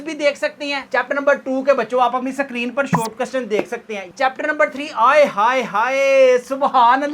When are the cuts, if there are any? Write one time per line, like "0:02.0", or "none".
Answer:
0:00.8
0:04.0

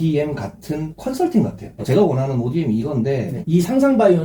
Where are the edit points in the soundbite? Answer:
0:01.8
0:03.4

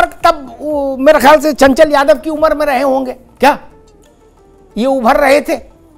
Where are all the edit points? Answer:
none

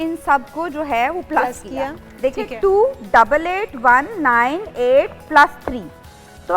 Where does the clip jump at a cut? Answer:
none

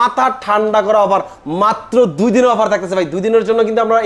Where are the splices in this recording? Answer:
none

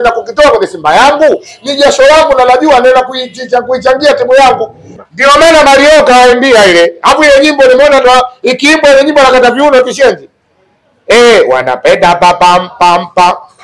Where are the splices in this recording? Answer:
0:04.9

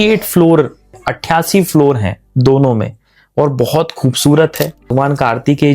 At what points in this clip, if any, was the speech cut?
0:01.1
0:04.9

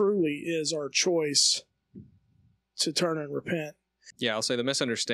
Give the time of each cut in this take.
0:04.1

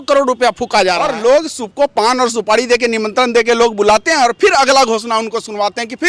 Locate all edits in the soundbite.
0:01.1

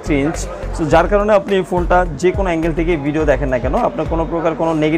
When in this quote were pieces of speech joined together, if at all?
none

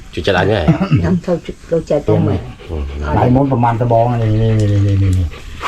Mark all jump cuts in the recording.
0:02.1

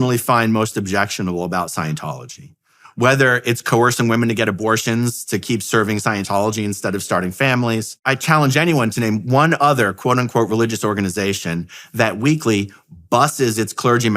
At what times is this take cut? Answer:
0:08.0

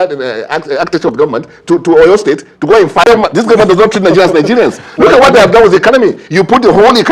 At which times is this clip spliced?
0:03.0

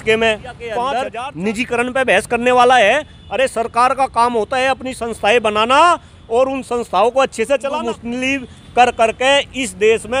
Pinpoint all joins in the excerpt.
0:01.1
0:07.7

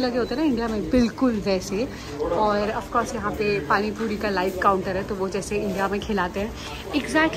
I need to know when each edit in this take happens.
none

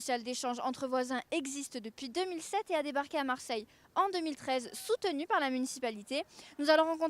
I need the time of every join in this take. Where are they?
0:03.3

